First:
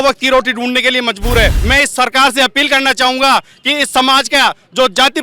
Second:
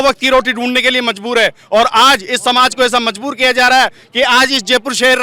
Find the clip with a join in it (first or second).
first